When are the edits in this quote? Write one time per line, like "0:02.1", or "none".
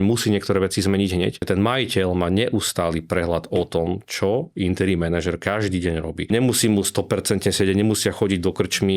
0:01.4
0:06.3